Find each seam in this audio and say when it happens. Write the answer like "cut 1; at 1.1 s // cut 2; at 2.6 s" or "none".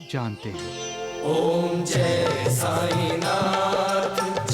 none